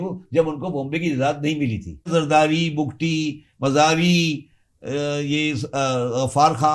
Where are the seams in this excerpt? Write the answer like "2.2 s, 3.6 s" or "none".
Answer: 2.1 s